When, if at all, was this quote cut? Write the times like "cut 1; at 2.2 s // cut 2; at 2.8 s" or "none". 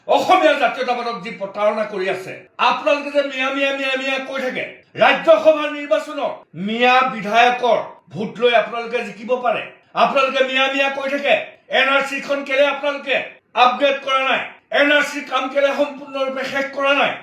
cut 1; at 4.8 s